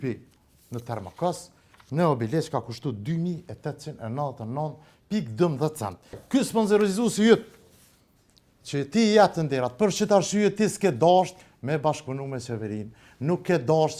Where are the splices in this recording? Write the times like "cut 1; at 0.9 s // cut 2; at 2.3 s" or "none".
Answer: cut 1; at 6.2 s